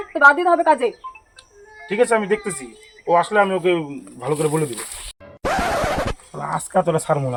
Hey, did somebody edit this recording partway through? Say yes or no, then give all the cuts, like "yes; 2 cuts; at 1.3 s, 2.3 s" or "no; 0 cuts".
no; 0 cuts